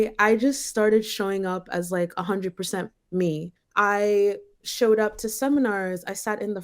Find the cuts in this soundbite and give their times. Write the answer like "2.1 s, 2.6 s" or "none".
3.6 s